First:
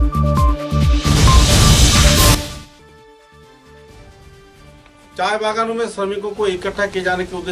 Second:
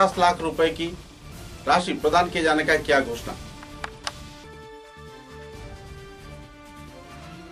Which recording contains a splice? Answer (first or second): first